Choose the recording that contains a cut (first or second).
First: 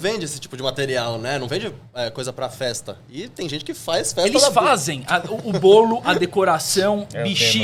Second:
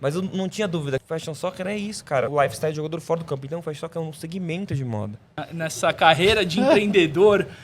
second